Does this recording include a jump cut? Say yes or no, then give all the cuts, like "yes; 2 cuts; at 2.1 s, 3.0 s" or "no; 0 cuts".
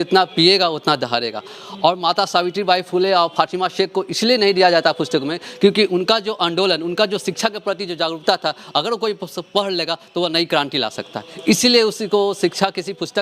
no; 0 cuts